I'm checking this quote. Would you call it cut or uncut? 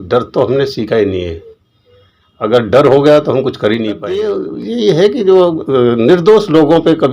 cut